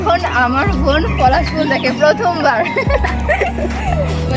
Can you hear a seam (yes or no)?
no